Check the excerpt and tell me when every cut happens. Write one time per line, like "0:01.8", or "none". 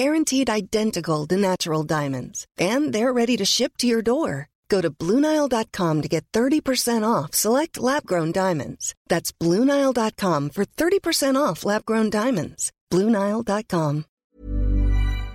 0:14.1